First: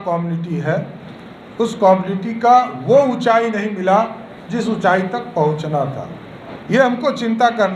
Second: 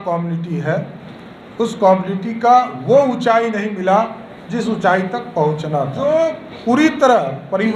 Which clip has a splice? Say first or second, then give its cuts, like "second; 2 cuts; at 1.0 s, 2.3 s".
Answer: second; 1 cut; at 5.9 s